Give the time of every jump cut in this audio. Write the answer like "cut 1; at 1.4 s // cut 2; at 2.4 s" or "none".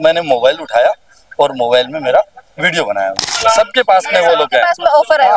cut 1; at 3.3 s